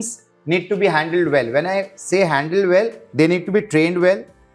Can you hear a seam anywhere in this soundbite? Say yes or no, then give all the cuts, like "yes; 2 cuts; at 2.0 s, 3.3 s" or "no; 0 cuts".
yes; 1 cut; at 3.0 s